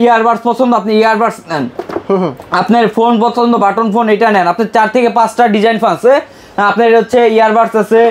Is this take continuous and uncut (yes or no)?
yes